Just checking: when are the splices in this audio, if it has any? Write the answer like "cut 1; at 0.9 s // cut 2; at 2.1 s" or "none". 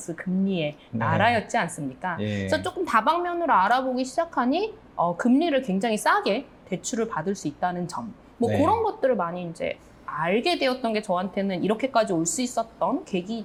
none